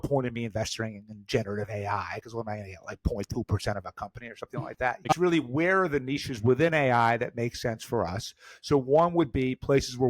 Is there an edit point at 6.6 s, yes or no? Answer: no